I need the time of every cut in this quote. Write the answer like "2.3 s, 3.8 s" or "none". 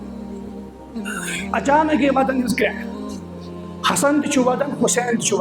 1.5 s